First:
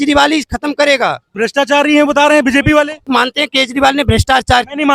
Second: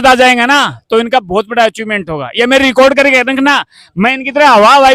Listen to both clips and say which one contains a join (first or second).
first